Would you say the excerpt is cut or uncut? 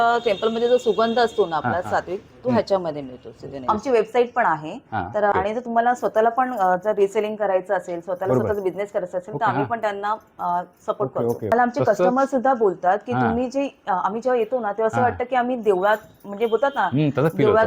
cut